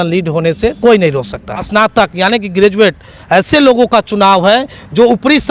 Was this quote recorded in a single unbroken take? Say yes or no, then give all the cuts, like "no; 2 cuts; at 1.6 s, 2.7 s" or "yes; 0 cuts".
no; 1 cut; at 1.7 s